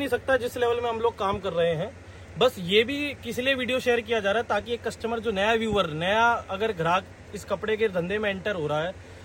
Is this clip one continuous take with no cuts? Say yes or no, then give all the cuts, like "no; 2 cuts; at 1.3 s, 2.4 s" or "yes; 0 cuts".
yes; 0 cuts